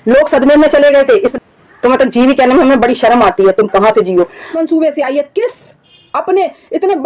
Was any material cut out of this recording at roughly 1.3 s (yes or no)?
yes